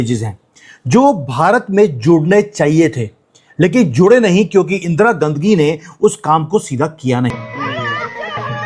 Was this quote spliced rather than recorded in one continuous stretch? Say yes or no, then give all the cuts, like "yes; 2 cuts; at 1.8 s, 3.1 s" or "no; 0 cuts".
yes; 1 cut; at 7.4 s